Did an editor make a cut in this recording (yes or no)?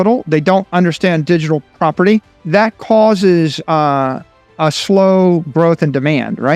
yes